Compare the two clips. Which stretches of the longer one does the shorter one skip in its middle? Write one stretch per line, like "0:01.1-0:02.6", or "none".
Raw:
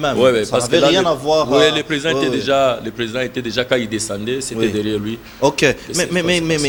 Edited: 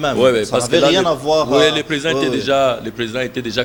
none